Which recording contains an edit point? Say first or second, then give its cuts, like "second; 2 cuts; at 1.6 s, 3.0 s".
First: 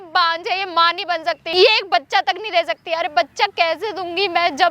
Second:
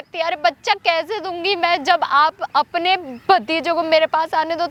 first; 1 cut; at 1.4 s